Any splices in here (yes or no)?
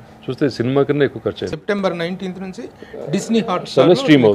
yes